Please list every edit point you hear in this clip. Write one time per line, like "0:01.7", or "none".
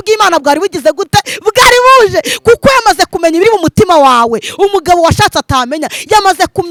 none